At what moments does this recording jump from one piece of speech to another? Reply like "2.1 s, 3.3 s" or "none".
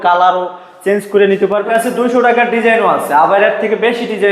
1.6 s